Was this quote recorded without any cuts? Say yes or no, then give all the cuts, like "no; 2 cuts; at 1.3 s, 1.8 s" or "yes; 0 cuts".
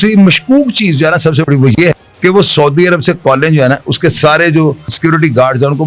no; 2 cuts; at 2.1 s, 5.0 s